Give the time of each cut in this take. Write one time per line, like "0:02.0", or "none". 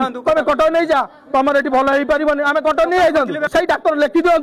0:03.5